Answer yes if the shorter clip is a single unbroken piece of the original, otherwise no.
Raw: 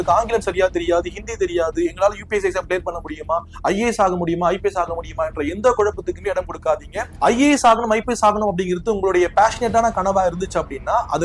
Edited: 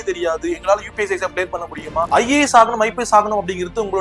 no